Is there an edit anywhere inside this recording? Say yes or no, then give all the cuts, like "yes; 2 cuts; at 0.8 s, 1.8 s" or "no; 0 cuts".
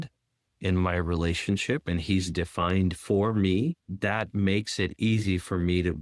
yes; 1 cut; at 3.9 s